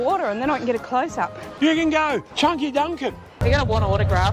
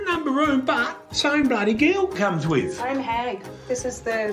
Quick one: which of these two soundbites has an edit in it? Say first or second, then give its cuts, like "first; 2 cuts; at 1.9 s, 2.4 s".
first; 3 cuts; at 1.4 s, 2.3 s, 3.3 s